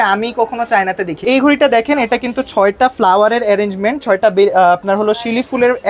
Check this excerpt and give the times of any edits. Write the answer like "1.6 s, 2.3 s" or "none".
1.2 s